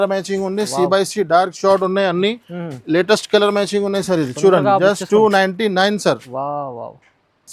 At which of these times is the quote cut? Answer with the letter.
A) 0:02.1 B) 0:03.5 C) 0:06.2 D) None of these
D